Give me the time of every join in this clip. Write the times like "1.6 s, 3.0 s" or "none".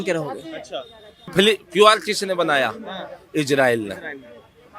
1.3 s